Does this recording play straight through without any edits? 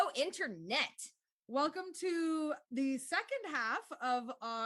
yes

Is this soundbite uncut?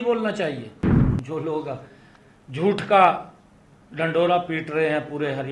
no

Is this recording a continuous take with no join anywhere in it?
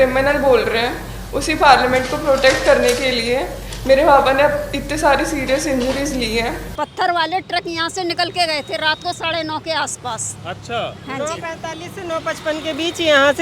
no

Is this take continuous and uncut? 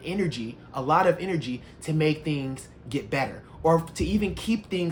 yes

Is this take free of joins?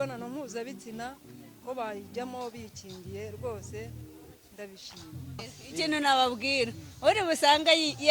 no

